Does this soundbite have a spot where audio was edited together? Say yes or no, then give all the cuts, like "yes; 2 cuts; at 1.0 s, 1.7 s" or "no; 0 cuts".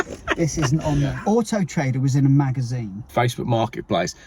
yes; 2 cuts; at 1.2 s, 3.1 s